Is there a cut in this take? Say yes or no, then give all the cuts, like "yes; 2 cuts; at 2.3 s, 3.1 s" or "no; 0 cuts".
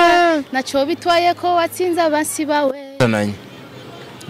yes; 1 cut; at 3.0 s